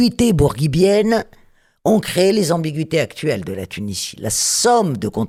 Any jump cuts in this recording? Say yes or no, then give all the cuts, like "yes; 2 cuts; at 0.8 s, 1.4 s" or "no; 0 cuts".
no; 0 cuts